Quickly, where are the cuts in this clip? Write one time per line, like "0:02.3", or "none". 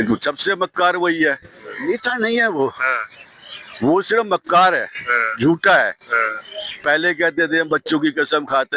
0:01.9